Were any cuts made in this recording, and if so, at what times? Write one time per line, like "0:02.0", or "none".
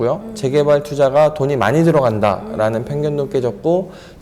none